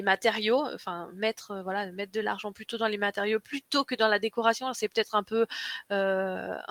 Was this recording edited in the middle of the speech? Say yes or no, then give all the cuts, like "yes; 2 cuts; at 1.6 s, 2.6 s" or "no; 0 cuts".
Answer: no; 0 cuts